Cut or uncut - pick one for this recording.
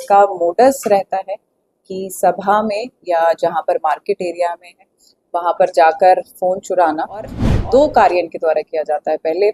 cut